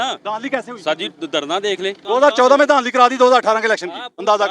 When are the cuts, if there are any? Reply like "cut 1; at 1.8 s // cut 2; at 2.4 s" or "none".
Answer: cut 1; at 2.0 s